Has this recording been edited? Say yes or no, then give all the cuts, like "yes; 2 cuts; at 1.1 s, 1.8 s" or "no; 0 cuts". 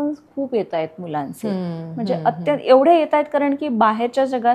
no; 0 cuts